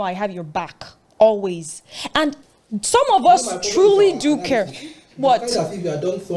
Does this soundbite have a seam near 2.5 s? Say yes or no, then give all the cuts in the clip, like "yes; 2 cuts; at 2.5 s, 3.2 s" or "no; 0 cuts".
yes; 1 cut; at 2.5 s